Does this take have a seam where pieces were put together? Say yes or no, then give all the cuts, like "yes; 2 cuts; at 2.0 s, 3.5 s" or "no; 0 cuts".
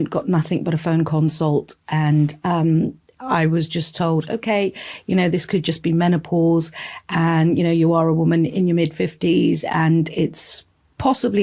no; 0 cuts